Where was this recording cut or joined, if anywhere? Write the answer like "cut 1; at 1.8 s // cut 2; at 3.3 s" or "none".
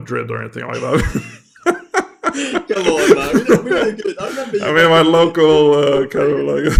none